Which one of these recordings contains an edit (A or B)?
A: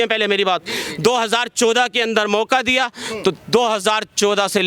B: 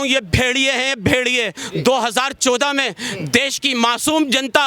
B